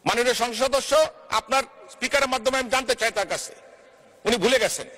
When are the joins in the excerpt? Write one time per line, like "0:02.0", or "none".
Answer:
none